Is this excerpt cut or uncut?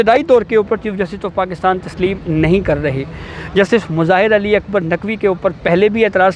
uncut